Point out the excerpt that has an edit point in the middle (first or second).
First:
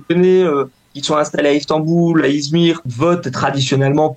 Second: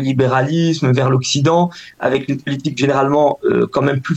first